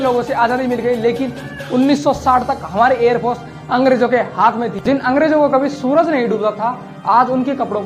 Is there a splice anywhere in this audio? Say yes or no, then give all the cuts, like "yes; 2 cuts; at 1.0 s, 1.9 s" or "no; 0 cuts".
yes; 1 cut; at 4.8 s